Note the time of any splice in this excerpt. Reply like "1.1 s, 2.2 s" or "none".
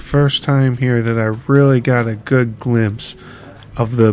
none